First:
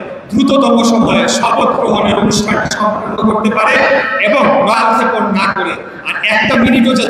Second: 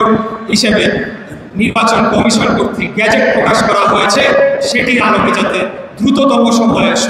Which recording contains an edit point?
first; 1 cut; at 4.7 s

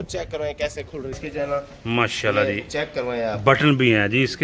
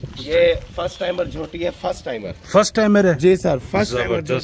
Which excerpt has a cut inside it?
first; 1 cut; at 1.1 s

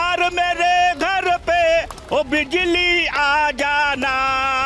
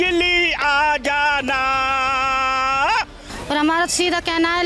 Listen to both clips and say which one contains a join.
second; 1 cut; at 3.3 s

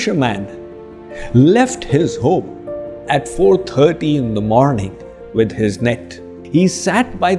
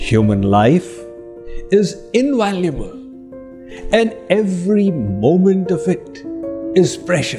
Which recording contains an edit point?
first; 1 cut; at 6.4 s

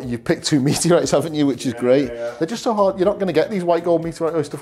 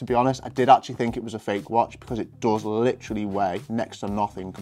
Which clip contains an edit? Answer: first; 1 cut; at 2.3 s

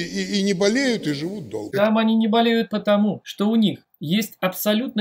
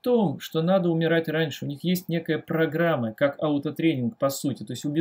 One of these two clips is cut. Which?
first; 3 cuts; at 1.6 s, 3.3 s, 3.9 s

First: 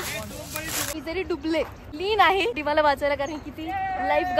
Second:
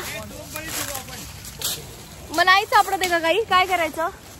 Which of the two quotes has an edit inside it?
first; 3 cuts; at 0.9 s, 1.8 s, 2.6 s

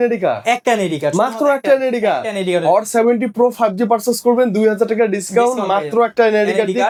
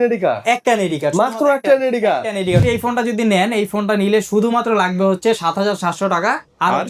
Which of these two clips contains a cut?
second; 1 cut; at 2.6 s

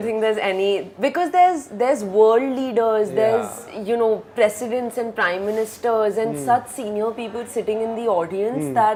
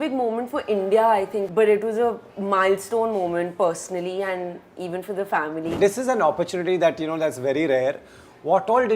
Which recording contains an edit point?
second; 2 cuts; at 1.5 s, 5.8 s

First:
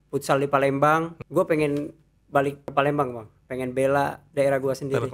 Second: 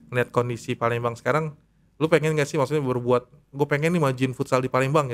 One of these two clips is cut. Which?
first; 3 cuts; at 1.2 s, 2.7 s, 4.2 s

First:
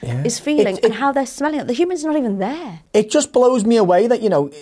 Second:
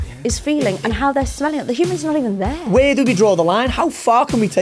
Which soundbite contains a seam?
second; 1 cut; at 2.7 s

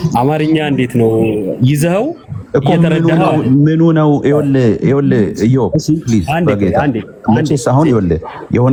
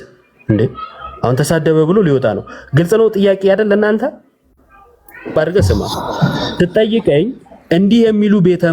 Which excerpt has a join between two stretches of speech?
second; 1 cut; at 5.3 s

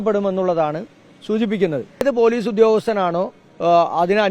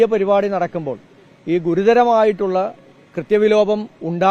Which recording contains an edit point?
first; 1 cut; at 2.0 s

